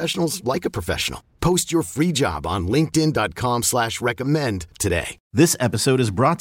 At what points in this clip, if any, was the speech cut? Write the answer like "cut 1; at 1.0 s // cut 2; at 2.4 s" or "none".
cut 1; at 5.2 s